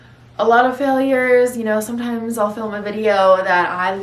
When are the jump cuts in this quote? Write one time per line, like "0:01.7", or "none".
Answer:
none